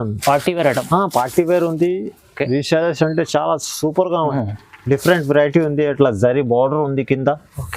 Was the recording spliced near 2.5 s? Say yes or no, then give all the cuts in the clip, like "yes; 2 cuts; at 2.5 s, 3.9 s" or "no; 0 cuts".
no; 1 cut; at 4.3 s